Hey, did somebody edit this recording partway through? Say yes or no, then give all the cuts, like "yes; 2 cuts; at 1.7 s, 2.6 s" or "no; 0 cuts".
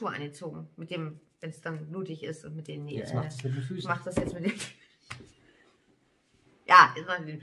yes; 1 cut; at 6.4 s